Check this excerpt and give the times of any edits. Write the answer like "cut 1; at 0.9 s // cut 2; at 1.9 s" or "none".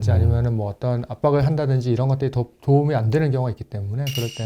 none